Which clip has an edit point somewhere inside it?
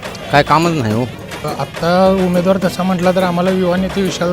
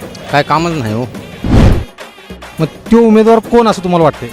first; 1 cut; at 1.4 s

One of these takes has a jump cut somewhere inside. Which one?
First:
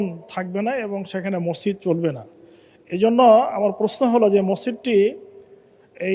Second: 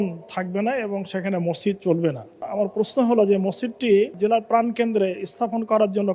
second; 2 cuts; at 2.5 s, 4.1 s

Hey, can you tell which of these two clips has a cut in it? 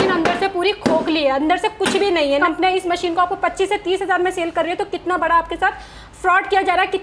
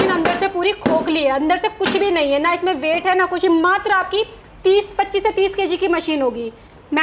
first; 1 cut; at 2.4 s

